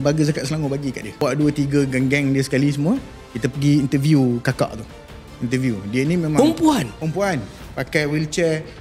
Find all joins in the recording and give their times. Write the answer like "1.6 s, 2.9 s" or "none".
1.2 s